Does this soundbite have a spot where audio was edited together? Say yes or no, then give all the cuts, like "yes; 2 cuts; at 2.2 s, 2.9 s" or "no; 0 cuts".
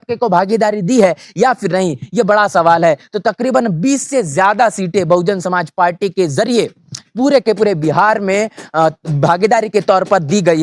no; 0 cuts